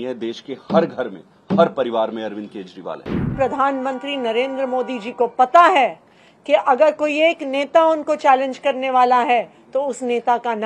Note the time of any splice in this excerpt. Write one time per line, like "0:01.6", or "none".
0:03.2